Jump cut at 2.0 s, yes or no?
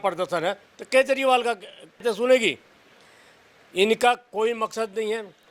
yes